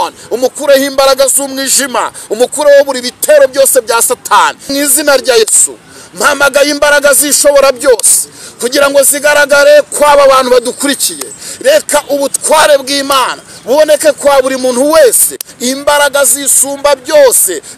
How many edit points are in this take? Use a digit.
2